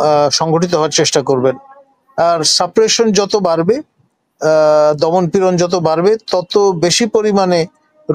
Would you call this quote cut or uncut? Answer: uncut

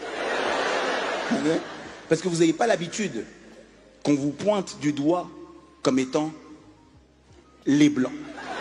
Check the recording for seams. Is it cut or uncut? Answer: uncut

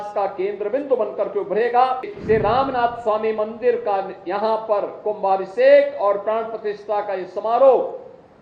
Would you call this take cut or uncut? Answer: cut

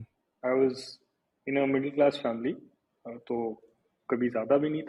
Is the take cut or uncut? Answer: uncut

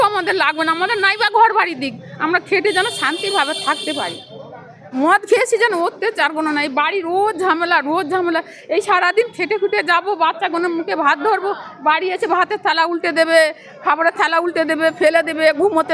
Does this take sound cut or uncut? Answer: uncut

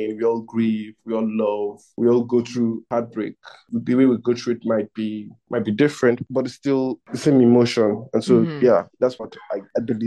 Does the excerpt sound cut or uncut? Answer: uncut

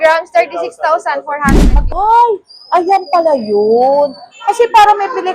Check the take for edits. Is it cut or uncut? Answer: cut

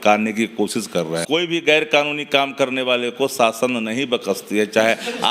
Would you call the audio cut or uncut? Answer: cut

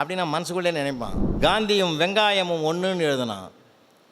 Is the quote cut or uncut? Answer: cut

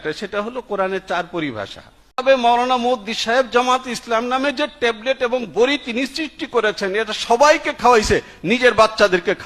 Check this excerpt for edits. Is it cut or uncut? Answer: cut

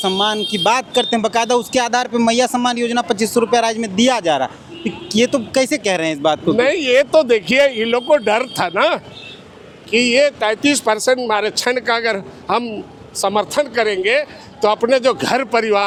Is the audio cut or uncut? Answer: uncut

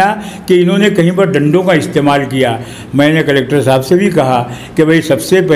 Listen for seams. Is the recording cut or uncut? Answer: uncut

